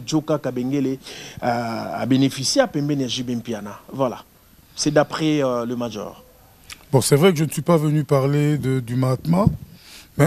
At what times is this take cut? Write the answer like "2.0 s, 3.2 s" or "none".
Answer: none